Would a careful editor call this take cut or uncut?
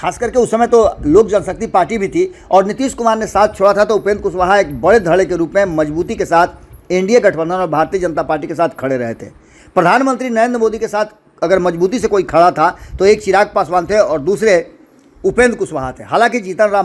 uncut